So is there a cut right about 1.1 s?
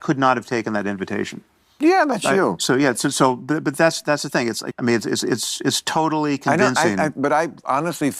no; 1 cut; at 4.6 s

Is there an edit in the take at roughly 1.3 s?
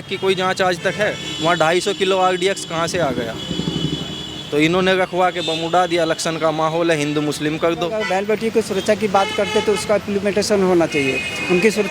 yes; 2 cuts; at 1.3 s, 8.0 s

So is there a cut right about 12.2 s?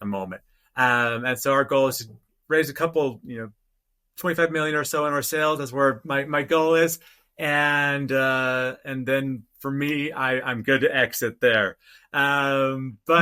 no; 0 cuts

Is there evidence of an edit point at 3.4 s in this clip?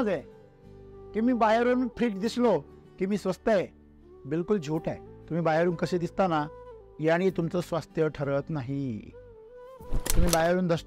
no; 1 cut; at 5.1 s

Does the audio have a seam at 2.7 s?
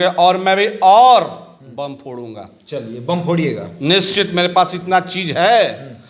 no; 0 cuts

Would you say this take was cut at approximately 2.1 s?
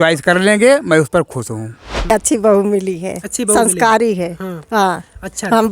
yes; 1 cut; at 2.1 s

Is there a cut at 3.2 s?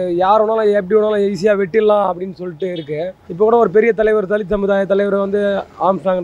yes; 1 cut; at 3.2 s

